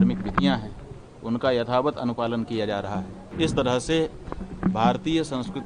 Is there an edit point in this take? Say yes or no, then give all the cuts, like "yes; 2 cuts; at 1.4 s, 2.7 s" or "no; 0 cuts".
yes; 1 cut; at 3.2 s